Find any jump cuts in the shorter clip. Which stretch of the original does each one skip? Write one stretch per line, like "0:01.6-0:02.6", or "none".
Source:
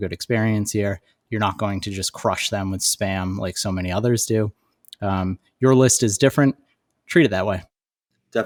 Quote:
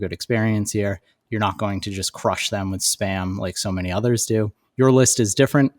0:04.6-0:05.5